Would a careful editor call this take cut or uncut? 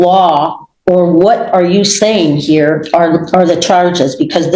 uncut